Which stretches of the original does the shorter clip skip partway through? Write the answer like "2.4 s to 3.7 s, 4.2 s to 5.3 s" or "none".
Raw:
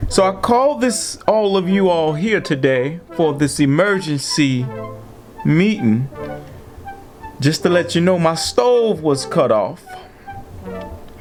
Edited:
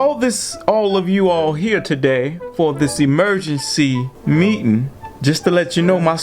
4.7 s to 5.3 s, 6.2 s to 7.2 s